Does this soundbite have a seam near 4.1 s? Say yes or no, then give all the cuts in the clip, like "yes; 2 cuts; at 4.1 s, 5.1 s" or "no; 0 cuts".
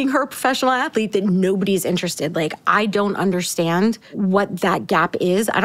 yes; 1 cut; at 4.1 s